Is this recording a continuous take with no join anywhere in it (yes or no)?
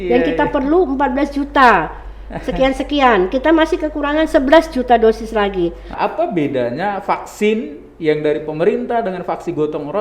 no